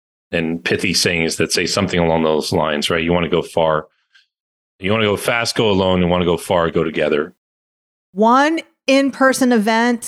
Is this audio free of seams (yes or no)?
no